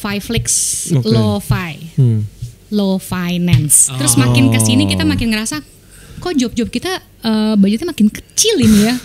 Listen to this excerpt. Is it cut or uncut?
cut